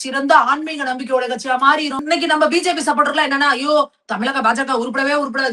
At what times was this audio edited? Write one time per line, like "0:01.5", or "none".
0:02.0